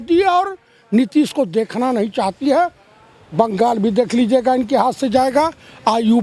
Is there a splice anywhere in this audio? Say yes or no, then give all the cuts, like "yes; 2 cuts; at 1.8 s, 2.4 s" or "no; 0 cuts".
no; 0 cuts